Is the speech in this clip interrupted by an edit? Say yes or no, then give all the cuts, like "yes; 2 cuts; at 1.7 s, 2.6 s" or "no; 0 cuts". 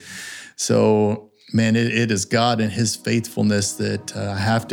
no; 0 cuts